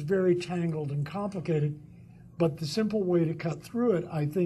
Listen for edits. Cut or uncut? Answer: cut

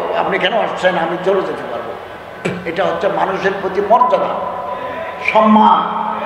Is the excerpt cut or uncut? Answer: uncut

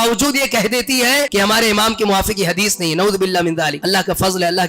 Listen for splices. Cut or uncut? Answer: cut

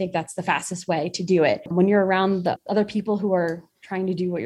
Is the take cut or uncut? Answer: cut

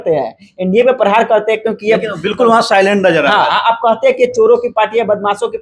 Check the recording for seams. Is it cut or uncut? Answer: uncut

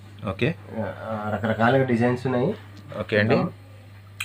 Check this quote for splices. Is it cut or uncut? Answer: uncut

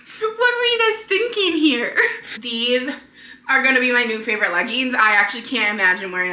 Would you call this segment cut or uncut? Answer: cut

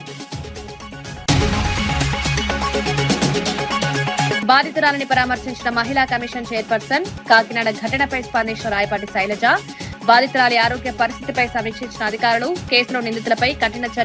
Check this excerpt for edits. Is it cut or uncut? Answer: cut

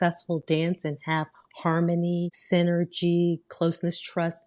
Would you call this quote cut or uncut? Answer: cut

